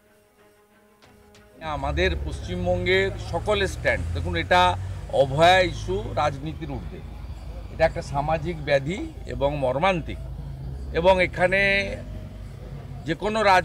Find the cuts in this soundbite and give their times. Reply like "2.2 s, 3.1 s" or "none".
1.3 s